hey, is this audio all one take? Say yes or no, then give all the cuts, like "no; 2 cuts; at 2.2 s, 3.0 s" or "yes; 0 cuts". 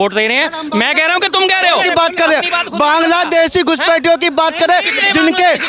yes; 0 cuts